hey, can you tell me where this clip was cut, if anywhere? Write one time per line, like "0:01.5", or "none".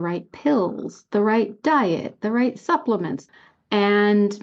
0:03.2

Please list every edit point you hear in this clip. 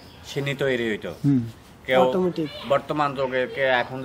none

